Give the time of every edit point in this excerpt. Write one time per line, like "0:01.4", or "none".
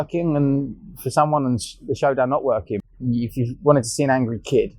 0:02.7